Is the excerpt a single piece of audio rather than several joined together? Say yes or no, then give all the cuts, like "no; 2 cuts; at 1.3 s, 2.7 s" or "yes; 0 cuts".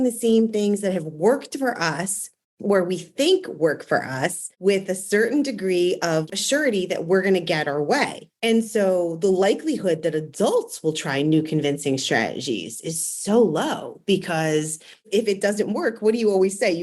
no; 1 cut; at 6.3 s